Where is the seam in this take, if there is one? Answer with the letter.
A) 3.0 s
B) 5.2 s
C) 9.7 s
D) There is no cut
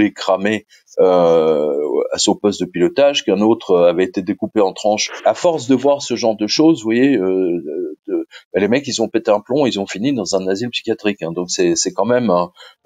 B